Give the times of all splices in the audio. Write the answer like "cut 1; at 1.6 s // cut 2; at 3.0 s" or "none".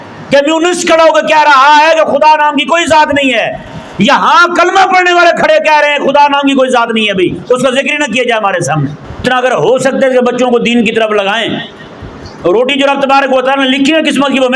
cut 1; at 9.2 s